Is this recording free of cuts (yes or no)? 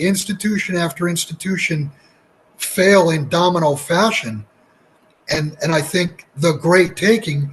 yes